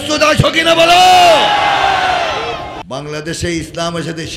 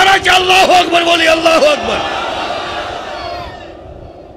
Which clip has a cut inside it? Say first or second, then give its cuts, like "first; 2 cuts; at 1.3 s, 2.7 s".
first; 1 cut; at 2.7 s